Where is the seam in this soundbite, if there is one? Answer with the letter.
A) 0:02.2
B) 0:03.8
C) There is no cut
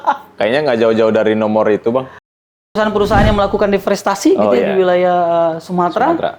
A